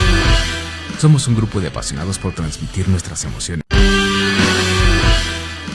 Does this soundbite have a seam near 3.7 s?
yes; 1 cut; at 3.7 s

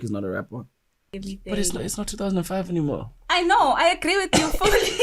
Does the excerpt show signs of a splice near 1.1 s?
yes; 1 cut; at 1.1 s

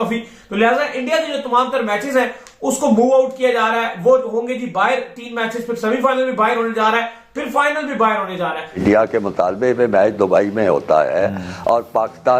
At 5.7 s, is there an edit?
no; 1 cut; at 8.7 s

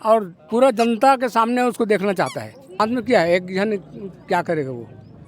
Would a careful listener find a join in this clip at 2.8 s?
yes; 1 cut; at 2.8 s

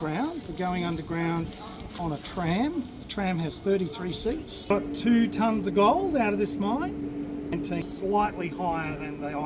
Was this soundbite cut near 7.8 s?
yes; 2 cuts; at 4.7 s, 7.8 s

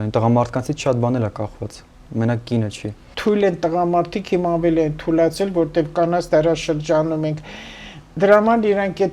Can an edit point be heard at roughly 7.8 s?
no; 1 cut; at 3.1 s

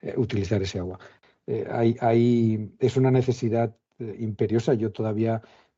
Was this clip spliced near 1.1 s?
yes; 1 cut; at 1.1 s

